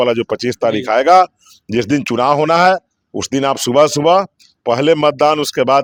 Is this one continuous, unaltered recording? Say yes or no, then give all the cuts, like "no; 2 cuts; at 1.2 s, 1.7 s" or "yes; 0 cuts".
yes; 0 cuts